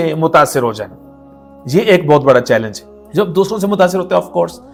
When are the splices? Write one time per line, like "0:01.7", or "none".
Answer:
none